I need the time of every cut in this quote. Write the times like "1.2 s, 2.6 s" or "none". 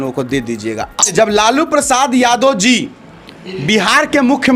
1.1 s